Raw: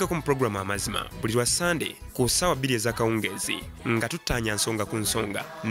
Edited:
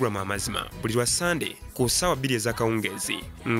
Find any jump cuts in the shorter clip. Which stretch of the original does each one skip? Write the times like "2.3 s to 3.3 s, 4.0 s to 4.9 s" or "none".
none